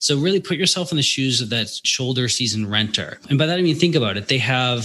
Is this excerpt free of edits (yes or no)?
no